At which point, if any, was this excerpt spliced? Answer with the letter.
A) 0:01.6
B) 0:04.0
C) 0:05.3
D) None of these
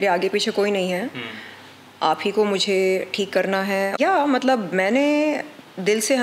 B